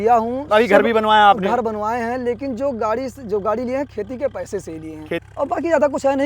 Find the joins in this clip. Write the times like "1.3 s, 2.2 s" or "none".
5.3 s